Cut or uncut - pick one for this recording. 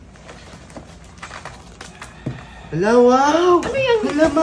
uncut